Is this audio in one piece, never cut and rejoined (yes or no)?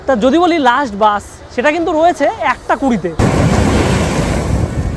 no